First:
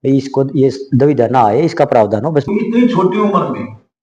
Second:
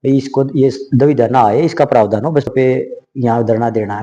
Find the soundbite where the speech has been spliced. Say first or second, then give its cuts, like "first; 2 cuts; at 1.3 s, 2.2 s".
second; 1 cut; at 2.5 s